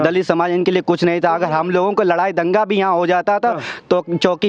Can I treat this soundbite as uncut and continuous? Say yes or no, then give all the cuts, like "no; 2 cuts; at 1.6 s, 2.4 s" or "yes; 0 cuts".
yes; 0 cuts